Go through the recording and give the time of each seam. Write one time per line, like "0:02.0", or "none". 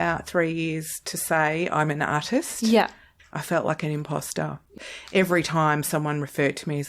0:03.1
0:04.6

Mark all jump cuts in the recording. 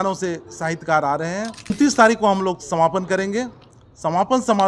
0:01.7

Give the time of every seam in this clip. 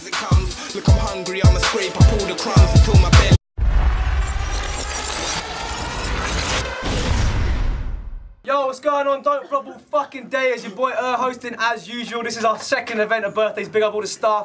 none

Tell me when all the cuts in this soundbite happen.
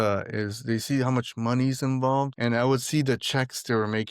0:02.3

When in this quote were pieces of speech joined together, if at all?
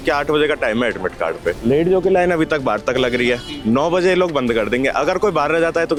none

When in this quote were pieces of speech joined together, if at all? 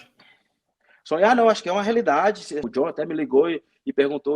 0:02.7

